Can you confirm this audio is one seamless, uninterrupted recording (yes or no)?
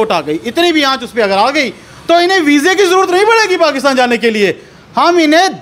yes